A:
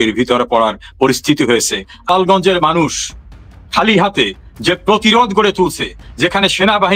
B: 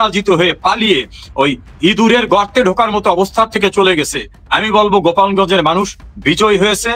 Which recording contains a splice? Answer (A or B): A